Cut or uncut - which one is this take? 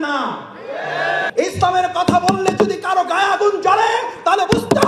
cut